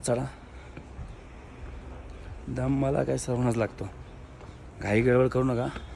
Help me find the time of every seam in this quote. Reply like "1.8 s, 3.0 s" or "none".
none